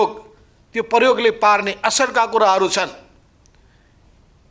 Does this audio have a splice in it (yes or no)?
no